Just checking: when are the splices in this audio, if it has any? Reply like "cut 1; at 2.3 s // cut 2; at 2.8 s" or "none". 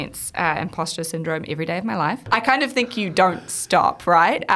cut 1; at 2.3 s